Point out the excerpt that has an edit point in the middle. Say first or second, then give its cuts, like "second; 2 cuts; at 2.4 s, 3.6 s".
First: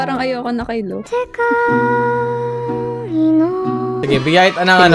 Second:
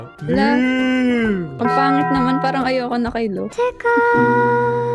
first; 1 cut; at 4.0 s